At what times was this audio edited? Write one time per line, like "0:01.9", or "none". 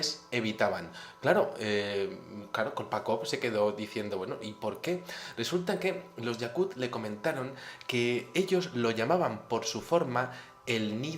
0:07.8